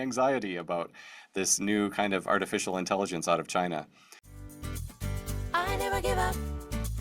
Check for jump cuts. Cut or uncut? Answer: cut